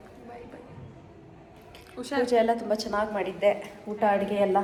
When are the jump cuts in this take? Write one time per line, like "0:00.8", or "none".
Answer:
none